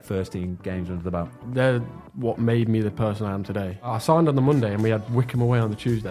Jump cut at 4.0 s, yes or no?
yes